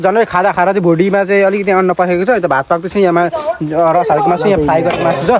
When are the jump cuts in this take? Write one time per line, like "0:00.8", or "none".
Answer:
none